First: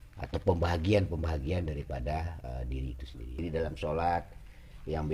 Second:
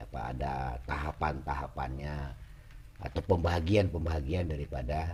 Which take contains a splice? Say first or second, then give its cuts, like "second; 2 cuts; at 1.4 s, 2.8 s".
first; 1 cut; at 3.4 s